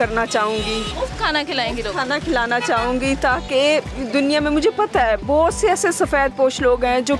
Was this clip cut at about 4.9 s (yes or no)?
no